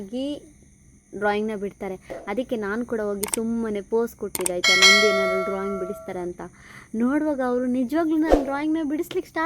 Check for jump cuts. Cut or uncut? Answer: uncut